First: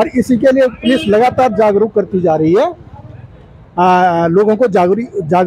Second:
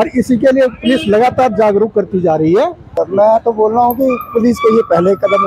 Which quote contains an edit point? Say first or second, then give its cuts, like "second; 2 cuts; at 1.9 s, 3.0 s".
second; 1 cut; at 3.0 s